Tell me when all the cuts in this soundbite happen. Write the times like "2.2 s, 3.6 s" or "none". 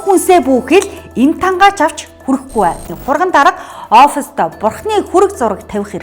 2.9 s